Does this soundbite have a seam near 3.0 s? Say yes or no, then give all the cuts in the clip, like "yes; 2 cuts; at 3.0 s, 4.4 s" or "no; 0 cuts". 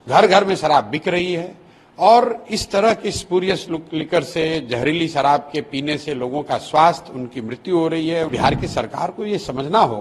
no; 1 cut; at 8.3 s